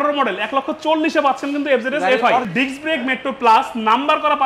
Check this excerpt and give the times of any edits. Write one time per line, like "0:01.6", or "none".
0:02.5